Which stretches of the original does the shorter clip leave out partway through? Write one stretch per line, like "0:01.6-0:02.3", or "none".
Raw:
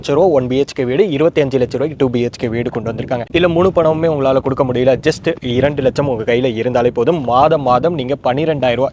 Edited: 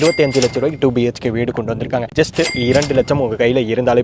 0:03.3-0:05.0